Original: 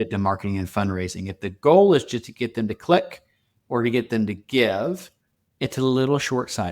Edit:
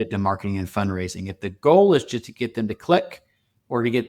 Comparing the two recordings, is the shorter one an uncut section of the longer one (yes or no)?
yes